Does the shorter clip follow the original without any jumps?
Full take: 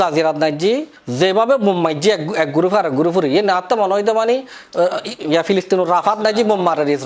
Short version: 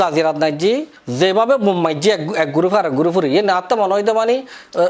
yes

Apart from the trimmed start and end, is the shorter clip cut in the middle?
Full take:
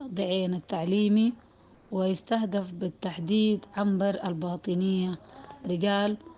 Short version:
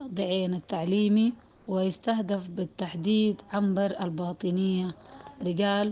yes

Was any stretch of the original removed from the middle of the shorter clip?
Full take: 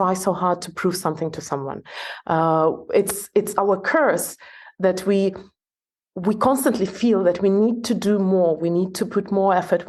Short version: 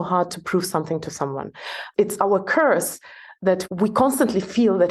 yes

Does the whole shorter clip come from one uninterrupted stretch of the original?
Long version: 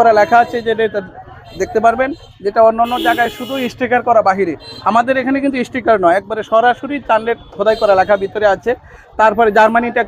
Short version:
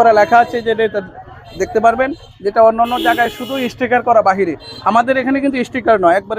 yes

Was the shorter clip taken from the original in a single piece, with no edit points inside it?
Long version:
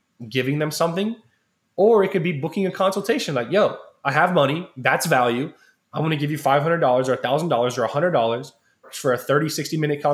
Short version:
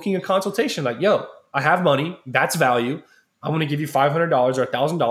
yes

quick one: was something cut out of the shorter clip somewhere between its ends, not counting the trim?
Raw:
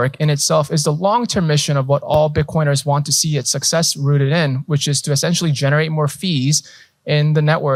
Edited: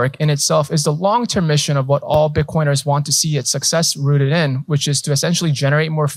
no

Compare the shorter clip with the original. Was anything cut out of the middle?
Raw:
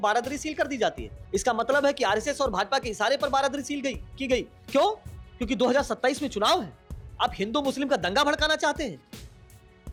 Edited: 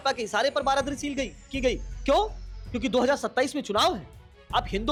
no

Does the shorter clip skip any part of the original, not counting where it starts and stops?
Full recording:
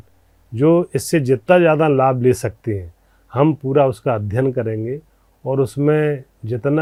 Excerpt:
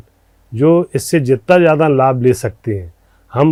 no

